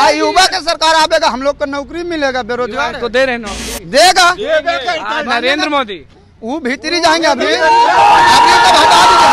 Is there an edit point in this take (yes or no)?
no